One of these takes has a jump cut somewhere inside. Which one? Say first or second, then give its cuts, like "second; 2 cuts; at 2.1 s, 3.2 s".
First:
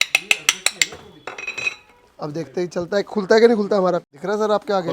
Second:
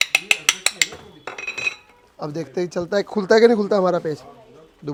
first; 1 cut; at 4.0 s